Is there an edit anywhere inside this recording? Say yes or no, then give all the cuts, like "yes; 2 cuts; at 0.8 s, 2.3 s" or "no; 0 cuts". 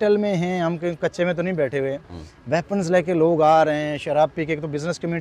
no; 0 cuts